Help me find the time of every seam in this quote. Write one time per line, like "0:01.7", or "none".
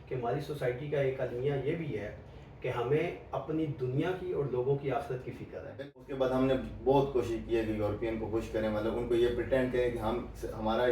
0:05.7

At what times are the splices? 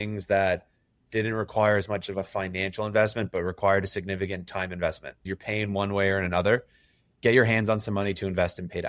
0:05.3
0:07.1

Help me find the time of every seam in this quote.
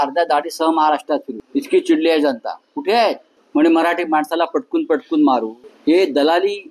0:01.4
0:03.3
0:05.6

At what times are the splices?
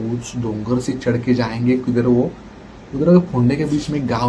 none

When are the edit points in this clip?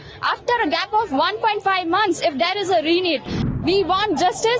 0:03.5

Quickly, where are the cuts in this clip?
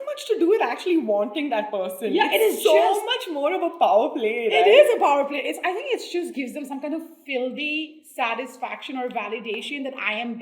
none

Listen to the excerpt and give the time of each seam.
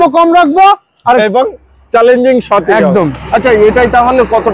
none

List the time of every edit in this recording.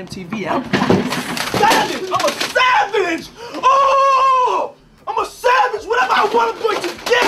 none

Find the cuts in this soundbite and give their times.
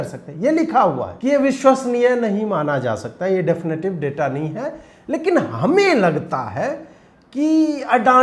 0:01.1

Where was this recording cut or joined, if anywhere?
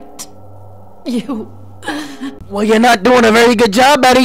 0:02.4

